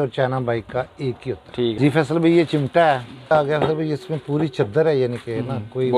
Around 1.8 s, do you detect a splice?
yes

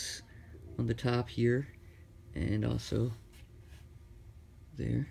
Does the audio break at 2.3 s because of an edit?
no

